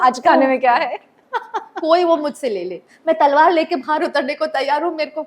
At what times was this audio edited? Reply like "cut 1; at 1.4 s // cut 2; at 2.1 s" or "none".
cut 1; at 1.2 s